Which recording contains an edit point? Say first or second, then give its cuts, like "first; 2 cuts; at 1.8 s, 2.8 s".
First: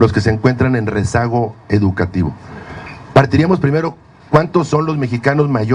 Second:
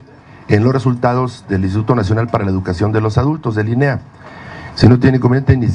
second; 1 cut; at 4.8 s